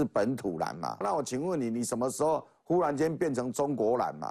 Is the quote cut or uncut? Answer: cut